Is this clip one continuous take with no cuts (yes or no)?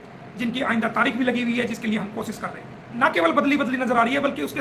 no